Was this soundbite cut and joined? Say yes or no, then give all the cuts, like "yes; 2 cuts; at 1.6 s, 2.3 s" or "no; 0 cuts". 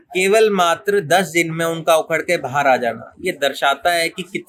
no; 0 cuts